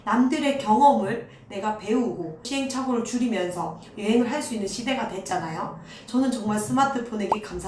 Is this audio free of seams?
yes; 0 cuts

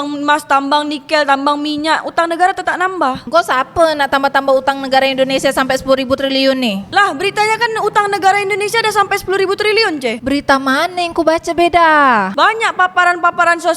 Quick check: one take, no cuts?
no; 1 cut; at 3.2 s

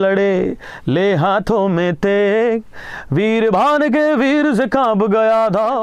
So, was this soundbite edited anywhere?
no; 0 cuts

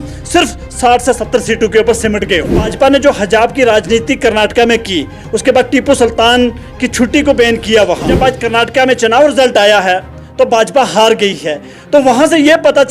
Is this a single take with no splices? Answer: no; 2 cuts; at 2.7 s, 8.1 s

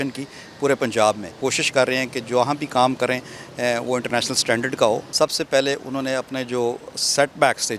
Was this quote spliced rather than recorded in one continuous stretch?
yes; 2 cuts; at 1.3 s, 5.1 s

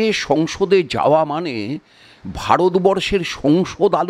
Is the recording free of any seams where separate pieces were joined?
yes; 0 cuts

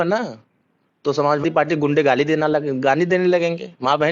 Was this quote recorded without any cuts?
no; 1 cut; at 1.4 s

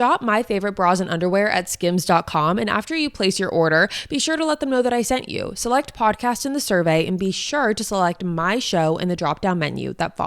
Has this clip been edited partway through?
no; 0 cuts

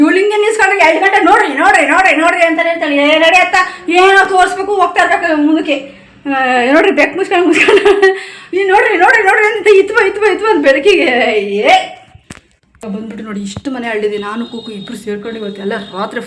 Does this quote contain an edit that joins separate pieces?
no; 0 cuts

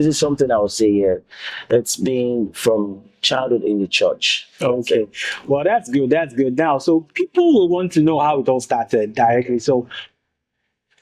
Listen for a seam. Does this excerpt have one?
no; 0 cuts

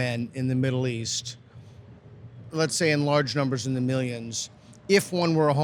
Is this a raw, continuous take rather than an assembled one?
no; 1 cut; at 2.5 s

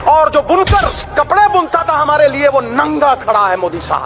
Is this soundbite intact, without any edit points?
no; 1 cut; at 1.0 s

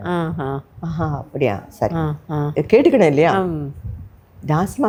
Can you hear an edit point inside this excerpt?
no; 0 cuts

